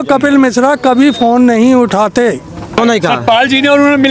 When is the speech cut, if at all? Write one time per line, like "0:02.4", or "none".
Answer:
0:02.8